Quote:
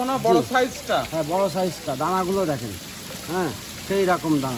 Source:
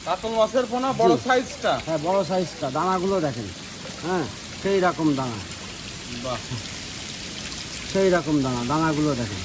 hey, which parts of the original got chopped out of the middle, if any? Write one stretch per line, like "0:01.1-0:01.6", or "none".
none